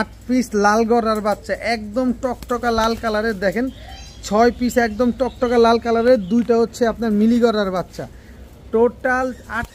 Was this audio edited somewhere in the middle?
no; 0 cuts

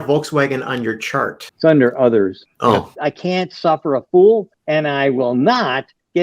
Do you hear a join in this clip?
yes; 1 cut; at 3.0 s

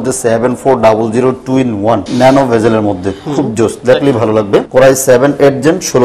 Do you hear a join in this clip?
yes; 2 cuts; at 2.1 s, 4.7 s

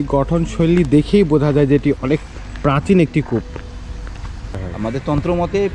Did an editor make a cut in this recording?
yes; 1 cut; at 4.6 s

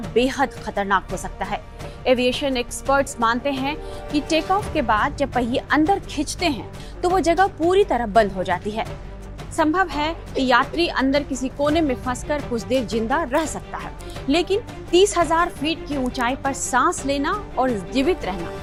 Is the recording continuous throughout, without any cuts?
yes; 0 cuts

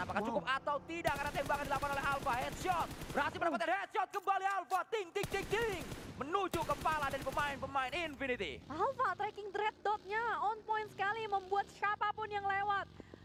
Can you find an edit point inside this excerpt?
no; 0 cuts

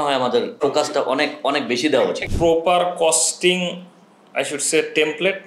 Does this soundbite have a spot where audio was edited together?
yes; 1 cut; at 2.2 s

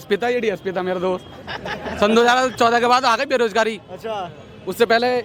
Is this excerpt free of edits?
yes; 0 cuts

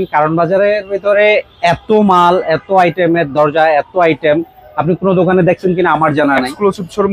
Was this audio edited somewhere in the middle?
no; 0 cuts

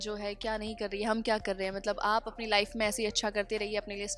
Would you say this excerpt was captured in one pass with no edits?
yes; 0 cuts

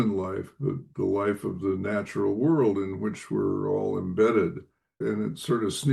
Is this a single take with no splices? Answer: no; 2 cuts; at 0.9 s, 5.0 s

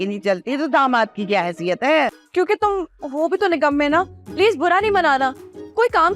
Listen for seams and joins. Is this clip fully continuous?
no; 1 cut; at 2.1 s

